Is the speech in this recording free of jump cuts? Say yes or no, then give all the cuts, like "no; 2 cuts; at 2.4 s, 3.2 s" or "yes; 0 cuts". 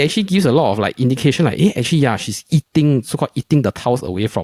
yes; 0 cuts